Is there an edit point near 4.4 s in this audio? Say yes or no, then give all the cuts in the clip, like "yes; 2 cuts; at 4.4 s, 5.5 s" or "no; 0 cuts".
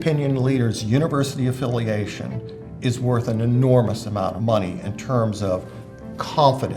yes; 1 cut; at 4.4 s